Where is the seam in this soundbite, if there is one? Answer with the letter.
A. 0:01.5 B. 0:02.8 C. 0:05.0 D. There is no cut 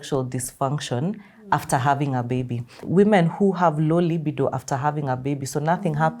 B